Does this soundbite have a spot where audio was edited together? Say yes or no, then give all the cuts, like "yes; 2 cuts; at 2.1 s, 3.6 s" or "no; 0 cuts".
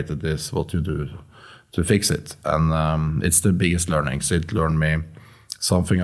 no; 0 cuts